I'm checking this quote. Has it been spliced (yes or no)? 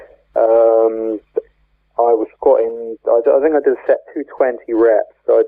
no